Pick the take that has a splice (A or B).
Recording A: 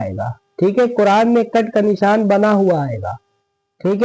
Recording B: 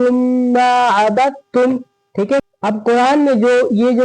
B